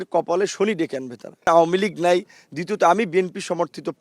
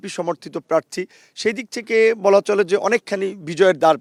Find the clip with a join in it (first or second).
first